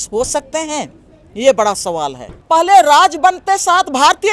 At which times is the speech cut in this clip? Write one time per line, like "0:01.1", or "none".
0:02.3